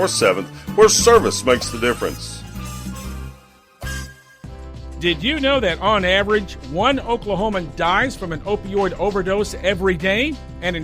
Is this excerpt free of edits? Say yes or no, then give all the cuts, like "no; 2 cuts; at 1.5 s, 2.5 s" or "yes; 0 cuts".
no; 1 cut; at 4.2 s